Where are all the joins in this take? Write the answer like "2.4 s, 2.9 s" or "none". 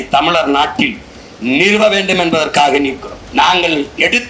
3.1 s